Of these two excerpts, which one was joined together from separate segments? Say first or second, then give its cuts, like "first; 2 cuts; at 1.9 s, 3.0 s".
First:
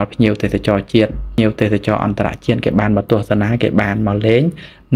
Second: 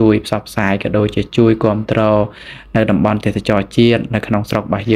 first; 1 cut; at 1.4 s